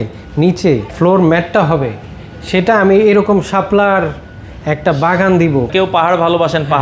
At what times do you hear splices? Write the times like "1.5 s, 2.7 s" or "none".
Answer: 0.9 s, 5.7 s